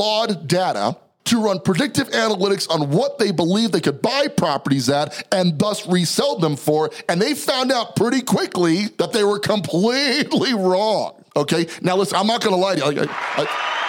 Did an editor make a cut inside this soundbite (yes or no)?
yes